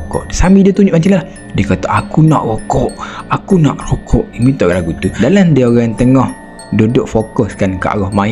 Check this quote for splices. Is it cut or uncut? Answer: cut